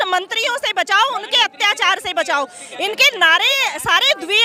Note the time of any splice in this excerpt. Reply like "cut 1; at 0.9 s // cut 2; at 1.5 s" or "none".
none